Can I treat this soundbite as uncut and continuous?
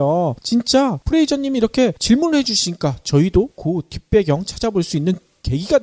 yes; 0 cuts

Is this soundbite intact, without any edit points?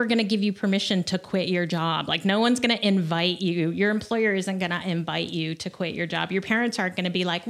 yes; 0 cuts

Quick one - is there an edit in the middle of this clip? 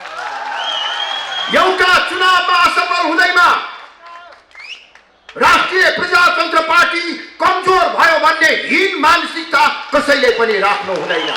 no; 0 cuts

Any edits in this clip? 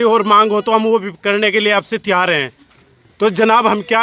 no; 0 cuts

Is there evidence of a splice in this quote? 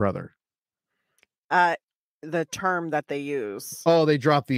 yes; 1 cut; at 1.8 s

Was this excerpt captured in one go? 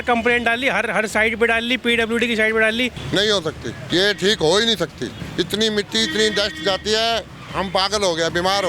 no; 3 cuts; at 3.0 s, 3.8 s, 5.2 s

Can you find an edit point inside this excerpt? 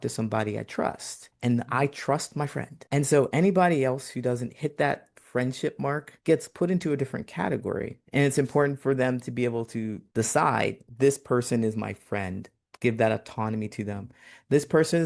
yes; 3 cuts; at 8.0 s, 10.0 s, 10.8 s

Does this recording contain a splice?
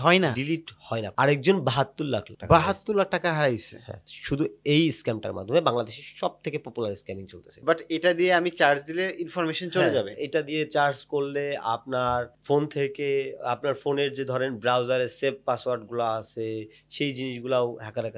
yes; 2 cuts; at 1.1 s, 7.5 s

